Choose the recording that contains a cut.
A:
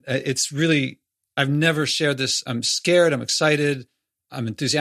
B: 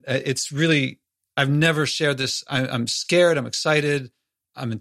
A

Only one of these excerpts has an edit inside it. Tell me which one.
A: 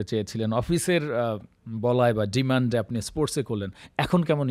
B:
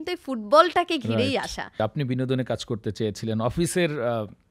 B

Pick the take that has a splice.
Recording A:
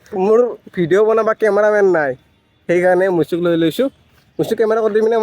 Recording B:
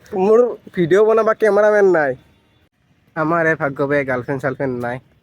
B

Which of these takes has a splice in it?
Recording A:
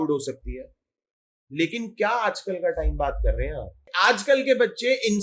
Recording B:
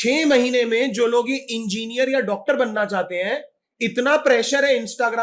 A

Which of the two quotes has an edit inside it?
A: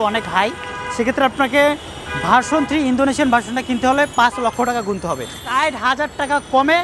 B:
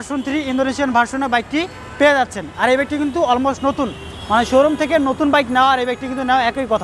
A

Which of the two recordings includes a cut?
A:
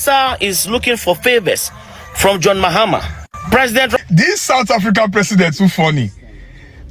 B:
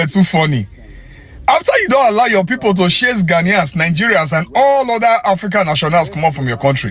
A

